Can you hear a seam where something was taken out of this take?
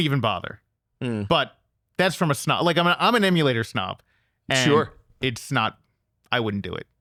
no; 0 cuts

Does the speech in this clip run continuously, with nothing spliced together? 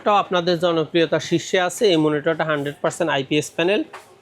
yes; 0 cuts

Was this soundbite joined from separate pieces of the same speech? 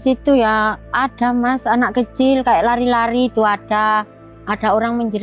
no; 0 cuts

